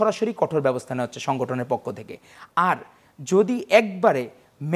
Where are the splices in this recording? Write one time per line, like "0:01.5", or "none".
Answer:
none